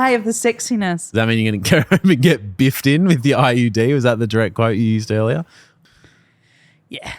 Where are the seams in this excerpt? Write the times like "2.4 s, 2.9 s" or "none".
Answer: 5.7 s